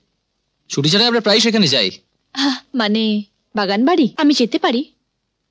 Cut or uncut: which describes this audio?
cut